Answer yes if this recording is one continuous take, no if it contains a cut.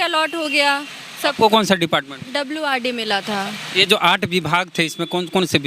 yes